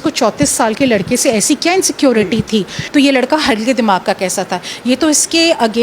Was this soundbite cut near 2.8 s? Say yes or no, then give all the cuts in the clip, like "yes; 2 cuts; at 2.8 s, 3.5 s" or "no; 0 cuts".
yes; 1 cut; at 2.8 s